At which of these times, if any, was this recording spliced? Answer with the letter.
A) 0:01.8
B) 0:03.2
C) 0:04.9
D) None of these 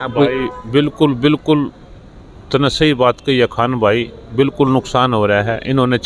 D